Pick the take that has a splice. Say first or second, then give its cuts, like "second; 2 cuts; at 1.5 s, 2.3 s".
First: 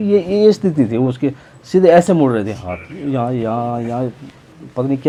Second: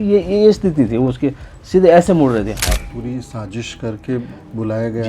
second; 1 cut; at 2.9 s